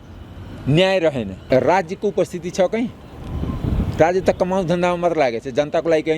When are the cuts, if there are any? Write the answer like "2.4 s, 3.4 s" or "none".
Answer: 1.4 s